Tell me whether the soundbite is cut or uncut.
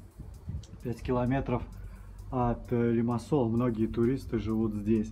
uncut